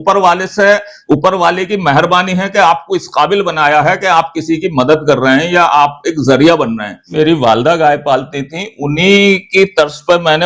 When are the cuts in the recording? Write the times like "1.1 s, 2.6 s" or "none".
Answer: 7.1 s